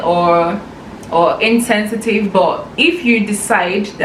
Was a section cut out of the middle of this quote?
no; 0 cuts

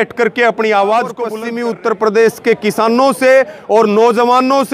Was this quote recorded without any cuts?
no; 1 cut; at 1.3 s

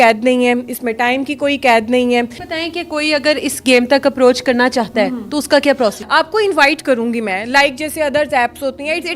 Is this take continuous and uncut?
no; 2 cuts; at 2.4 s, 6.0 s

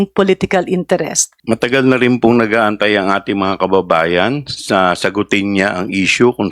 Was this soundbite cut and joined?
yes; 1 cut; at 1.3 s

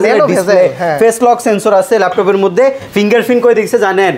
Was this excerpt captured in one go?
yes; 0 cuts

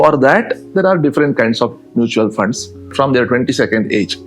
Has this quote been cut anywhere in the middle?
yes; 1 cut; at 2.9 s

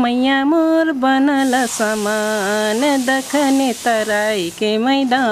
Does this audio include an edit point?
no; 0 cuts

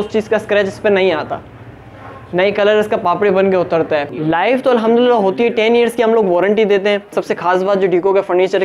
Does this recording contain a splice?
yes; 2 cuts; at 4.1 s, 7.2 s

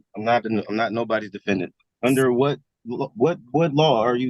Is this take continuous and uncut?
no; 1 cut; at 1.8 s

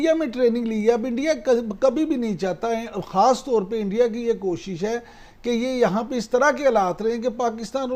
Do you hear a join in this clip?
no; 0 cuts

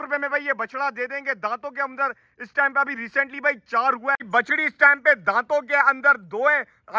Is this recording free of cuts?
no; 1 cut; at 4.2 s

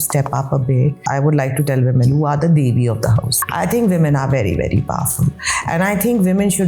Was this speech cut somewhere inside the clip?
yes; 3 cuts; at 1.0 s, 2.1 s, 3.4 s

